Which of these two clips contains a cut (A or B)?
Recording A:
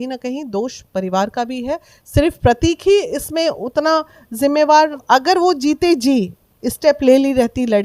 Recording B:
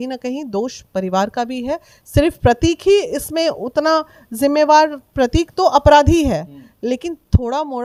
A